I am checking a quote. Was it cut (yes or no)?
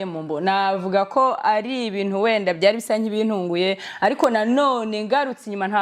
no